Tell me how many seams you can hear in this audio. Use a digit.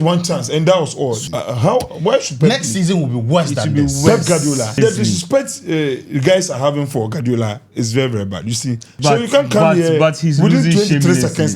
3